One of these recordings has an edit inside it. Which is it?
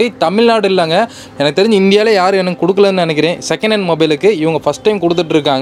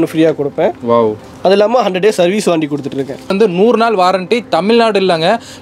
second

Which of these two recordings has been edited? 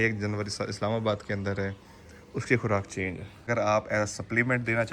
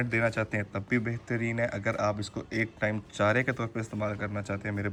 first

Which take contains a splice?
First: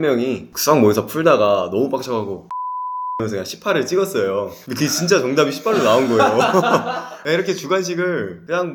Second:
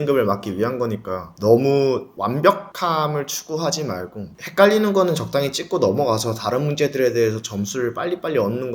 second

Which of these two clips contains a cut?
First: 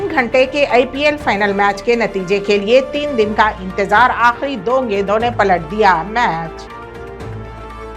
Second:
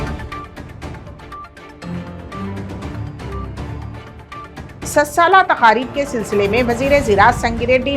second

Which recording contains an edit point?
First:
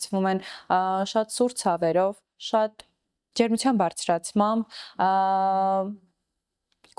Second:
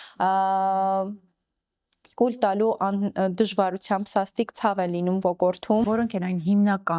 second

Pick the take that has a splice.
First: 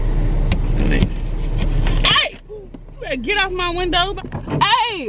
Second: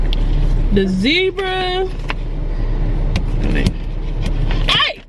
first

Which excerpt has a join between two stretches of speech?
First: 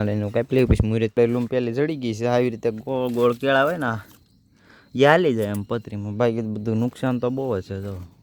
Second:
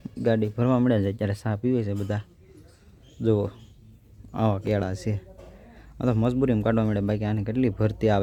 first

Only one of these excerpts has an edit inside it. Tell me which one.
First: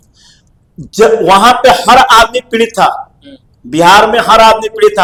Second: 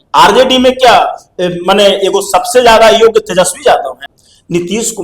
second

